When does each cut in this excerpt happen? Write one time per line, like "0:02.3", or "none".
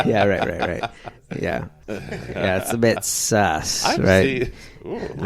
0:01.7